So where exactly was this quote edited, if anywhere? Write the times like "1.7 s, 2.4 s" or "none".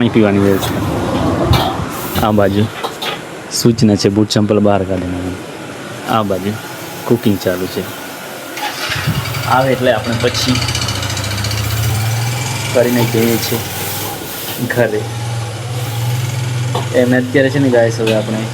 none